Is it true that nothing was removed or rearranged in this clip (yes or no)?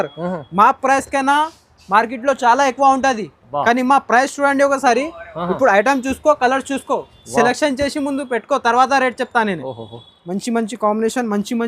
no